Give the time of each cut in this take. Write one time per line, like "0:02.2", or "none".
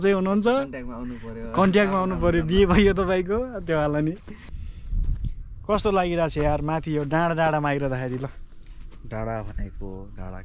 0:04.5